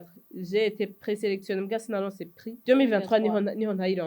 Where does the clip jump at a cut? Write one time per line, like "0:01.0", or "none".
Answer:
0:02.6